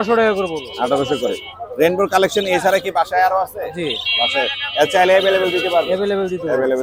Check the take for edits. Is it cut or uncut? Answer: uncut